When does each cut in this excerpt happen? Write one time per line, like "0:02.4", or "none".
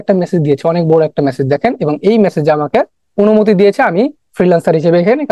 0:03.0